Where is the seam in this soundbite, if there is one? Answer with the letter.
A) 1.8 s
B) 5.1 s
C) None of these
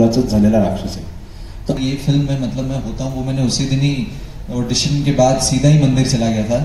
A